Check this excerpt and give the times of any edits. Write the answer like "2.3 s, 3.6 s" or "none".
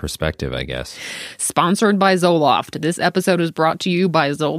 1.1 s